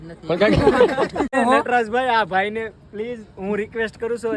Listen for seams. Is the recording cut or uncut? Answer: cut